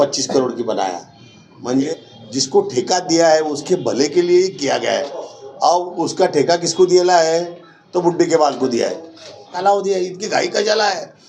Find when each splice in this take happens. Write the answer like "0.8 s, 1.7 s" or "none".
1.9 s, 9.6 s